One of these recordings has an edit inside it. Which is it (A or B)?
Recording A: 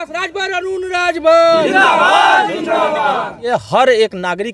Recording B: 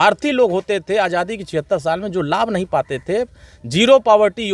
A